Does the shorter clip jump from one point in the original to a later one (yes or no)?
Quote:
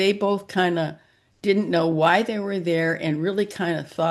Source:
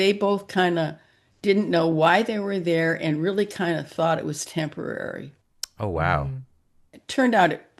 no